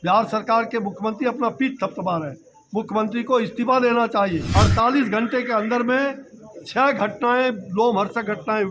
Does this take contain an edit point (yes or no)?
yes